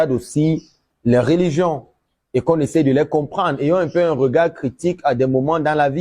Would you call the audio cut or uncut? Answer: uncut